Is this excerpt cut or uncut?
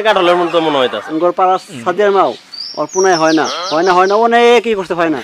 cut